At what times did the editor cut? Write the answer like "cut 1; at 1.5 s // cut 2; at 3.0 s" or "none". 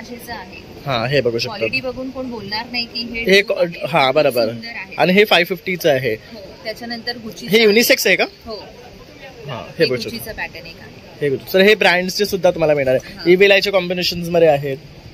none